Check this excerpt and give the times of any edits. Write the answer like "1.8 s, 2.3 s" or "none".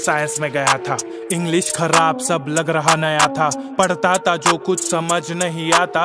none